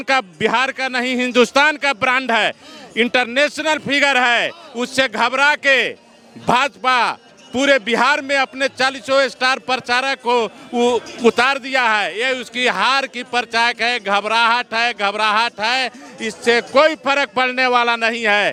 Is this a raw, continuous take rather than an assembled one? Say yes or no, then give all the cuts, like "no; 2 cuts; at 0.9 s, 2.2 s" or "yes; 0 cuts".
yes; 0 cuts